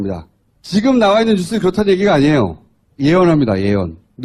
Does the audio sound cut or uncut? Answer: cut